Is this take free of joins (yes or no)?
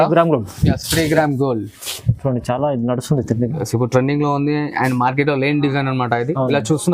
yes